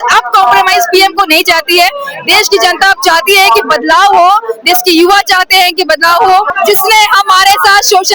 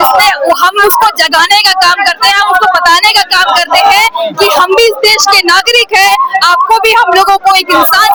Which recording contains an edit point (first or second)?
first